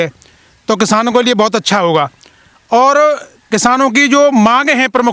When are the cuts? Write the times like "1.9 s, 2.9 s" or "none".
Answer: none